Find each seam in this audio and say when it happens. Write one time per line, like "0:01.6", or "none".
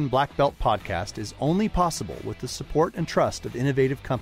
none